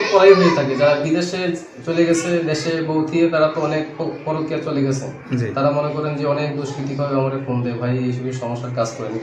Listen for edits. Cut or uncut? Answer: uncut